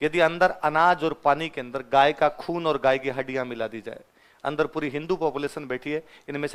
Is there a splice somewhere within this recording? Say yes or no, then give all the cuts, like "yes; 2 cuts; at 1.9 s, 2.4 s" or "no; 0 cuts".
no; 0 cuts